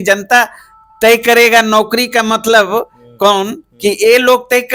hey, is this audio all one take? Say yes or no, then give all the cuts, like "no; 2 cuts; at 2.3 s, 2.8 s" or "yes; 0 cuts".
yes; 0 cuts